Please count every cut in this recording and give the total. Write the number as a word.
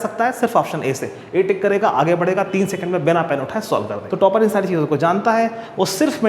one